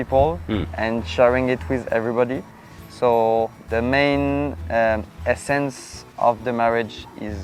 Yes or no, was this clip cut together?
no